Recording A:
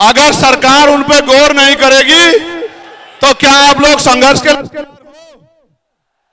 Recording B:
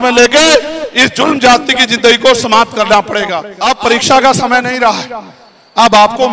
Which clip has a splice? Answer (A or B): B